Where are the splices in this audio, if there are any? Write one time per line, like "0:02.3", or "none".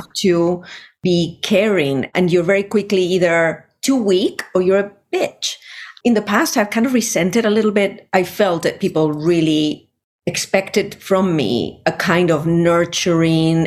none